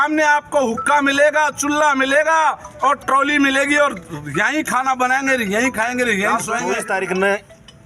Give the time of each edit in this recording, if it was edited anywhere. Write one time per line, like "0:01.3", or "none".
0:06.7